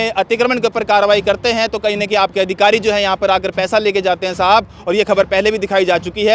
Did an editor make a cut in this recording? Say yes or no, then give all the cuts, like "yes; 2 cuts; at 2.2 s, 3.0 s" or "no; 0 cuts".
no; 0 cuts